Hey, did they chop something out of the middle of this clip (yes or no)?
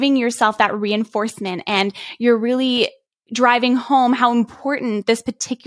no